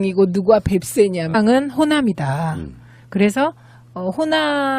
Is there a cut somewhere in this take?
no; 0 cuts

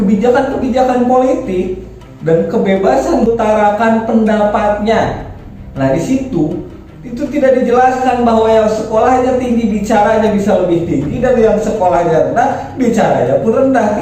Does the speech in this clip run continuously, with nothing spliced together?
no; 1 cut; at 3.3 s

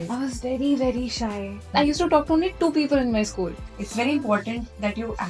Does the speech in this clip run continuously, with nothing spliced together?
no; 2 cuts; at 1.7 s, 3.6 s

